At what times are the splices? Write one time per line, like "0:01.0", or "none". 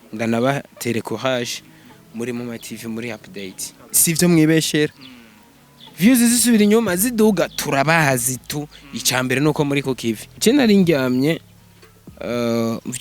0:10.3